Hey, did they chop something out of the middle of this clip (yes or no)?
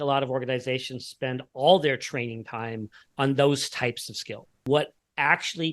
yes